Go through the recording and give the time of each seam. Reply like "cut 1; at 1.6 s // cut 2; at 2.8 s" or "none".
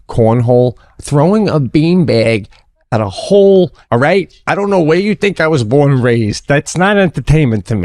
cut 1; at 0.9 s // cut 2; at 3.8 s